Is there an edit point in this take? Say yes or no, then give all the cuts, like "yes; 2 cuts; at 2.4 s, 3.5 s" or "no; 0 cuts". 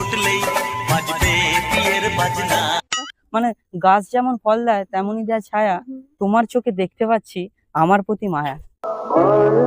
yes; 1 cut; at 3.1 s